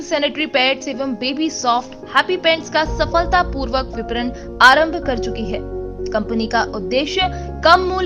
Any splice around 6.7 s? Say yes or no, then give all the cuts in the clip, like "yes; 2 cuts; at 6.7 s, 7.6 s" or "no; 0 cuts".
no; 0 cuts